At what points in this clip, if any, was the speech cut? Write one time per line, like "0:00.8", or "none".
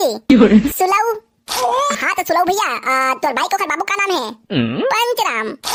none